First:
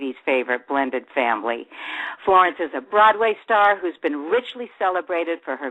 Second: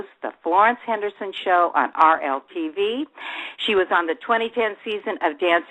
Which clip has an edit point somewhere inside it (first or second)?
second